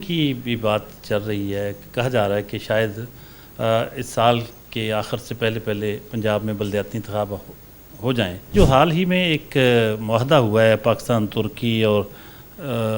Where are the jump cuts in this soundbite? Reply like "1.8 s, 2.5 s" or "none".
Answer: 8.5 s